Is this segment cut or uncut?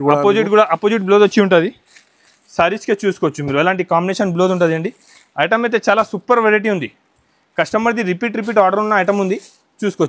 uncut